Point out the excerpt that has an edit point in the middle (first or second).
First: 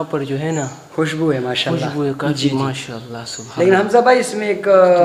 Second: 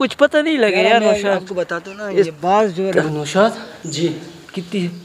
second